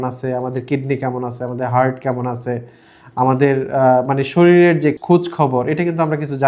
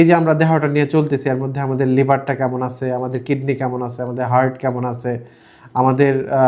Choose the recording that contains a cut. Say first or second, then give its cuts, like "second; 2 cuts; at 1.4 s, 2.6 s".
first; 1 cut; at 5.0 s